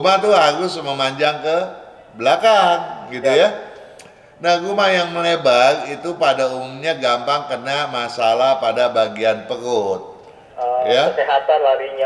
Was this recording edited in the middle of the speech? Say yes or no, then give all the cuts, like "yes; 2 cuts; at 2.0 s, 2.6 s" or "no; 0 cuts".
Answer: no; 0 cuts